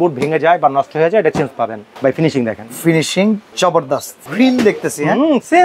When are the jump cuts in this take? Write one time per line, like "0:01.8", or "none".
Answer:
0:01.8
0:04.0